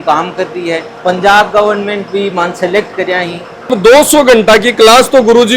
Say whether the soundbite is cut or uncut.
cut